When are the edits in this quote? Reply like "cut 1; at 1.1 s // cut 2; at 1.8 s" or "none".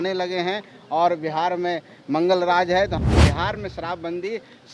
cut 1; at 3.0 s